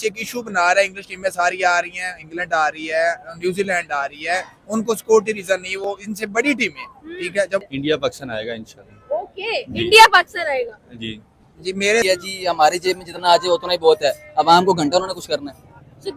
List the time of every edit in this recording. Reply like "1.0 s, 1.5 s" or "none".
7.7 s, 12.0 s